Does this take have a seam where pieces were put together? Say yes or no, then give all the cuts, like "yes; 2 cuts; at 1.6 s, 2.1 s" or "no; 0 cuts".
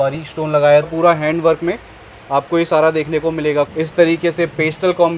yes; 2 cuts; at 0.9 s, 3.7 s